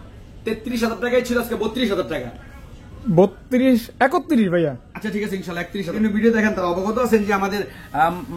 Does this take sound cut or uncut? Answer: cut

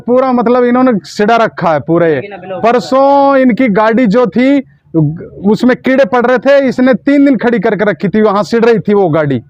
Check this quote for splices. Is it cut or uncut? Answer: uncut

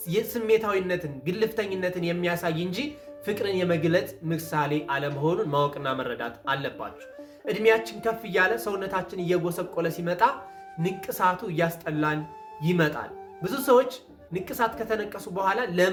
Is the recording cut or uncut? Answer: uncut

